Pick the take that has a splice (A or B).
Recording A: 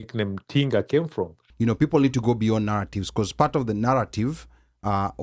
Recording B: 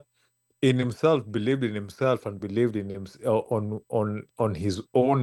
A